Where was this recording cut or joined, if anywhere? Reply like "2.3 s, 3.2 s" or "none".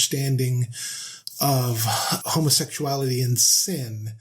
2.2 s